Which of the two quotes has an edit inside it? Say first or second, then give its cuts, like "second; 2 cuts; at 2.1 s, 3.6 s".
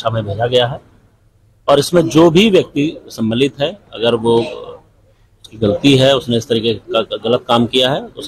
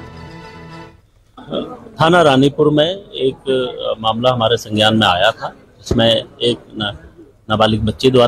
second; 1 cut; at 0.9 s